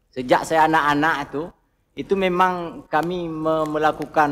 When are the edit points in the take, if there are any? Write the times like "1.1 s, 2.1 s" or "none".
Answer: none